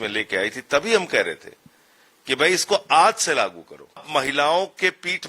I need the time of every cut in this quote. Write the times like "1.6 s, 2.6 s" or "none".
4.1 s